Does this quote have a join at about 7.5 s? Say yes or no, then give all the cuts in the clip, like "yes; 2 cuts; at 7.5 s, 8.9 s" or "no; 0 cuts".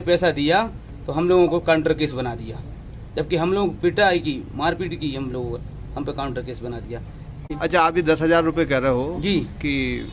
yes; 1 cut; at 7.5 s